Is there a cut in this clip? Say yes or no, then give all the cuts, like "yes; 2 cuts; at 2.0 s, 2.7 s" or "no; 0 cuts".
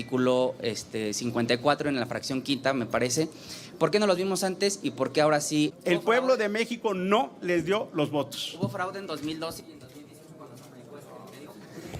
yes; 1 cut; at 5.8 s